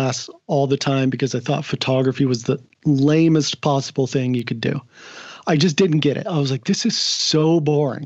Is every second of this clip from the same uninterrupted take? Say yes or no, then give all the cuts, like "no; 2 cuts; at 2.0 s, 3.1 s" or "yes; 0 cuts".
yes; 0 cuts